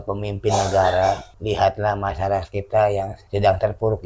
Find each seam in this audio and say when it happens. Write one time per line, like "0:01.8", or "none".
0:01.3
0:03.2